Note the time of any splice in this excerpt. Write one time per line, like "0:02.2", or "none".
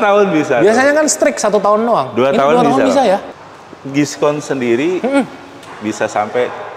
0:03.3